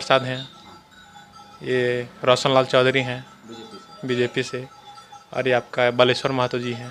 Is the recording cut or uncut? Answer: uncut